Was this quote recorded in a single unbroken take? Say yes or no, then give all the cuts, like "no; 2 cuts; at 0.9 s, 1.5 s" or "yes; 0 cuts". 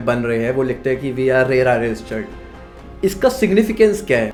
yes; 0 cuts